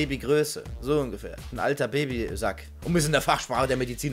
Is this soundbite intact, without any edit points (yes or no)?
yes